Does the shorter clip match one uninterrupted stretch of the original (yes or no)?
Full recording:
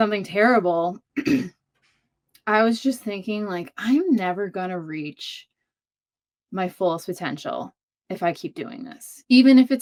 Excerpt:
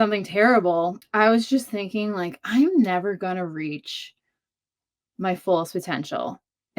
no